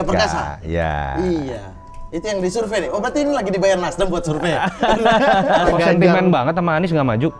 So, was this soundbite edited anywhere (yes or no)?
yes